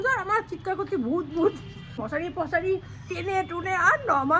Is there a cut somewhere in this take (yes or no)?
yes